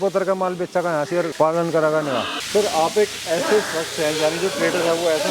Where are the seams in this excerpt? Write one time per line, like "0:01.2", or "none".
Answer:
none